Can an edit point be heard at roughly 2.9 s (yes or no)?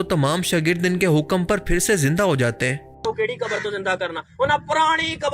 yes